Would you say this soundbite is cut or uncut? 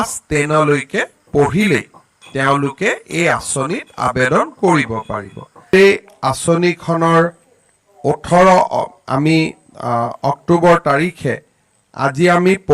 cut